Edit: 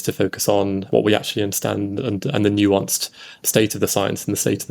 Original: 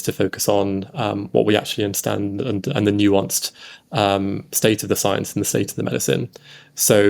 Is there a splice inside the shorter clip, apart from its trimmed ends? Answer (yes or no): yes